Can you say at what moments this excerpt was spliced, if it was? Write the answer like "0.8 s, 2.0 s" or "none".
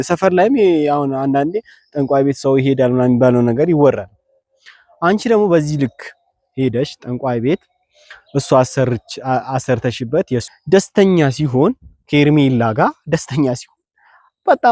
10.5 s